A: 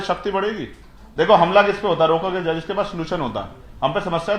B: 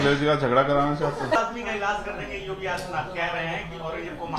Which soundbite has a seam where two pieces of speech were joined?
B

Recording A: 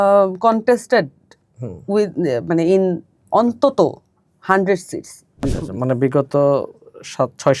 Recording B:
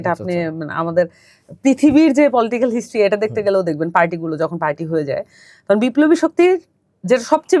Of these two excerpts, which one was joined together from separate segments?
A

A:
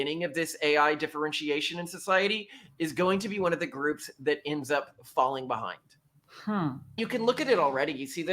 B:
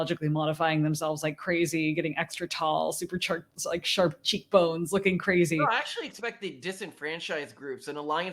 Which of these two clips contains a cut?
A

